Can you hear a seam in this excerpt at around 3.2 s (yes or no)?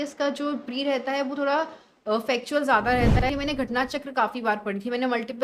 yes